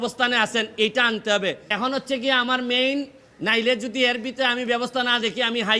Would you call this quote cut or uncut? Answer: cut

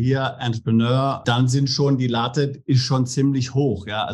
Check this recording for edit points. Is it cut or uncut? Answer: cut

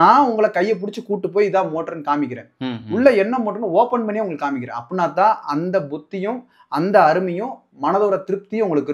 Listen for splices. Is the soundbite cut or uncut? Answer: uncut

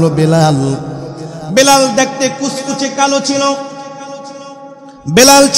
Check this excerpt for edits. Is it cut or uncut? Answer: uncut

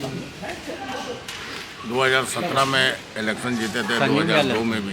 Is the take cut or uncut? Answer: uncut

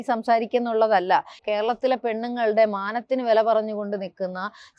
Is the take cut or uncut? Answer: cut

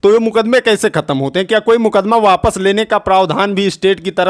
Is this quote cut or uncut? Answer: uncut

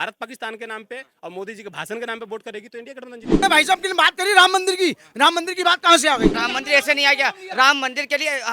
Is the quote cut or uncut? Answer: cut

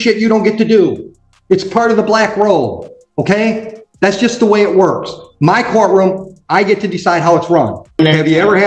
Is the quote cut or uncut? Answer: cut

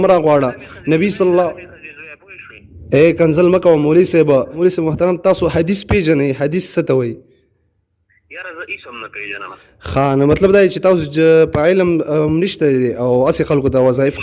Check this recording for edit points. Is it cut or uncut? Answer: cut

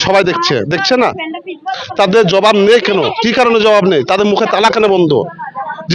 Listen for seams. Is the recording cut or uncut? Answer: uncut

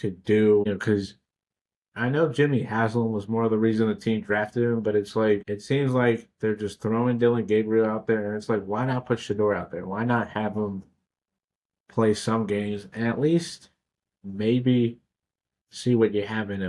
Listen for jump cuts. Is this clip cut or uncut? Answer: cut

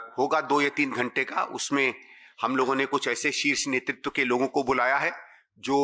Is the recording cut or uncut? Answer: uncut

